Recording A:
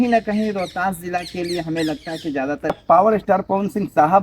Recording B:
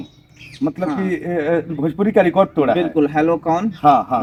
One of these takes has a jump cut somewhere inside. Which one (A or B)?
A